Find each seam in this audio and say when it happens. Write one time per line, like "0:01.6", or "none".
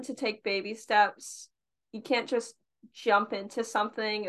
none